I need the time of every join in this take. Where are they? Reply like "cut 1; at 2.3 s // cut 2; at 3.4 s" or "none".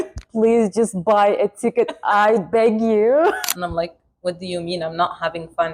cut 1; at 3.4 s